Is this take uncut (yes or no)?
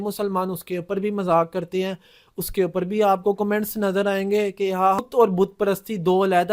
no